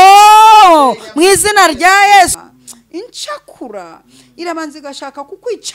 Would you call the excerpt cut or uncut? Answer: cut